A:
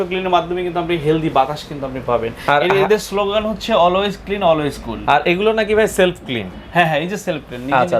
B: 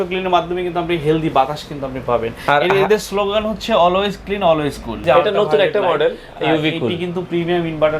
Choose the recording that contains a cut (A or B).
B